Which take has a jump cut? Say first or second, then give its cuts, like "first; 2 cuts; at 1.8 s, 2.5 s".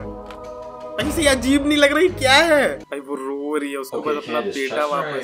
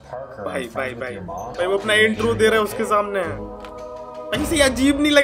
first; 1 cut; at 2.8 s